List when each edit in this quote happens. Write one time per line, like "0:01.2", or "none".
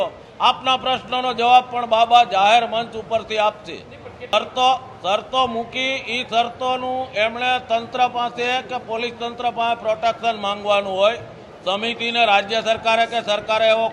none